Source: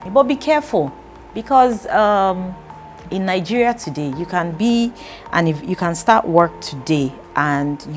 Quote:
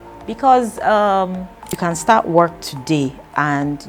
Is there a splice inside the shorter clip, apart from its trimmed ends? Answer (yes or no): yes